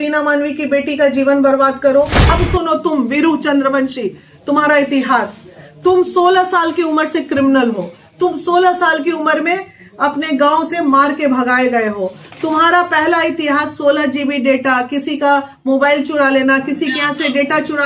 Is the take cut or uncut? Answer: cut